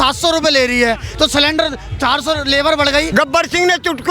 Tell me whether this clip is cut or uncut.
cut